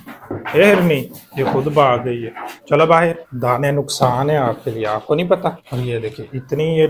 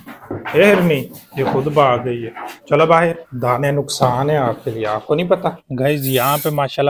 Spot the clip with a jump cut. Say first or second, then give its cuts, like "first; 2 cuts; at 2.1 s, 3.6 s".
second; 1 cut; at 5.6 s